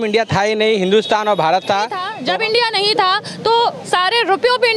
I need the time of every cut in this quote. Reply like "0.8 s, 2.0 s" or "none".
2.1 s